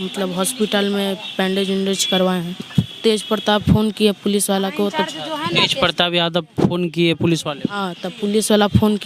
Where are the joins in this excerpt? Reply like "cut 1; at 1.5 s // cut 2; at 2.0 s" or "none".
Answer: none